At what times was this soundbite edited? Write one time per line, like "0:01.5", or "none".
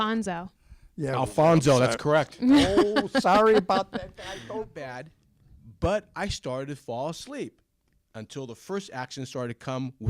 0:04.8